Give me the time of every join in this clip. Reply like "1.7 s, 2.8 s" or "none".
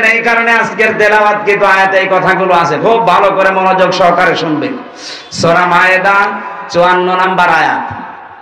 none